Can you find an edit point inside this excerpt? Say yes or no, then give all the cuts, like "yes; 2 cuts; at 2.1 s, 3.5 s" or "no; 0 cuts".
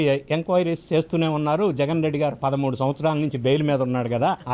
no; 0 cuts